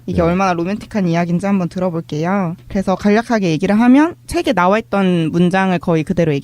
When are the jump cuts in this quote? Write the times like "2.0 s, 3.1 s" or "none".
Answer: 4.4 s